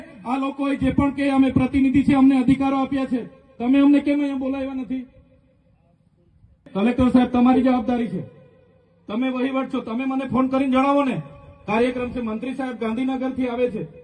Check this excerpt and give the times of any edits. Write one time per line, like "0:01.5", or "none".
0:06.7